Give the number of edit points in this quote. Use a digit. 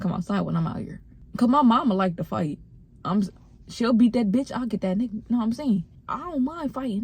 1